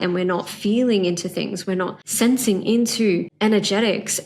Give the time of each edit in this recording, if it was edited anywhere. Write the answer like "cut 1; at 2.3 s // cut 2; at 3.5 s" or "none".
cut 1; at 2.0 s // cut 2; at 3.3 s